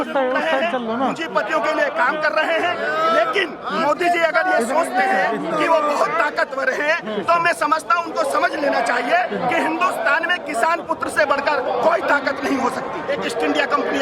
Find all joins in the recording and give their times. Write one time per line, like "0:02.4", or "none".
0:13.0